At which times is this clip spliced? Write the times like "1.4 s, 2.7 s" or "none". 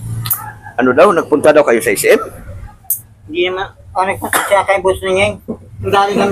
none